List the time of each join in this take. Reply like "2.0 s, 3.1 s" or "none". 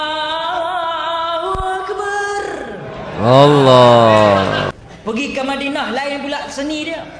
4.8 s

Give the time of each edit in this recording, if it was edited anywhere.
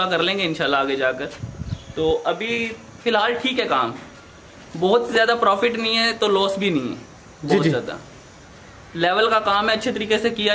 none

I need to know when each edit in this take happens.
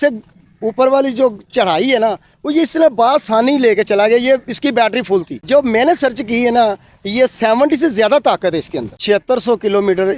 8.9 s

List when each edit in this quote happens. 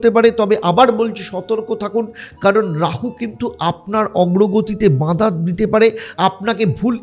none

